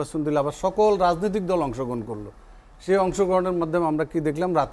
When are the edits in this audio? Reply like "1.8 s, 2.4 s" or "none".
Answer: none

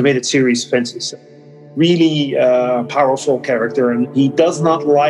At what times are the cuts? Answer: 1.3 s, 4.1 s

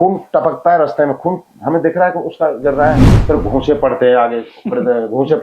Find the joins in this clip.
3.1 s

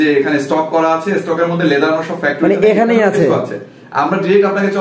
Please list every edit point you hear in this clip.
none

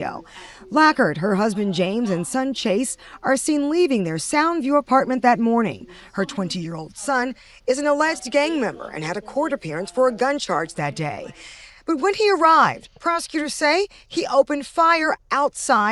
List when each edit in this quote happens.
none

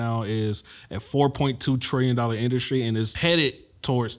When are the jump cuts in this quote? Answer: 3.1 s

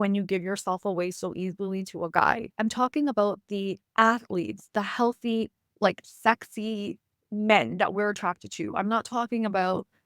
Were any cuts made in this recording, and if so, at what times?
3.8 s, 5.6 s

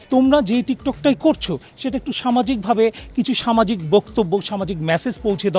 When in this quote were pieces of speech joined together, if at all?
none

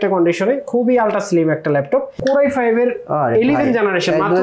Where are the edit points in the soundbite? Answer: 2.2 s

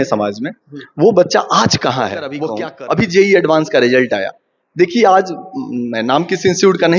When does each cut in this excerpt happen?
2.4 s

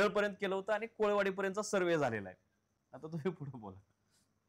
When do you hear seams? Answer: none

